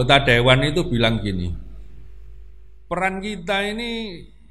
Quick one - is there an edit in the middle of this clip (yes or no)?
no